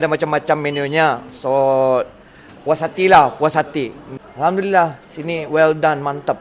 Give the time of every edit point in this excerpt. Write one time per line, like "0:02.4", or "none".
0:04.0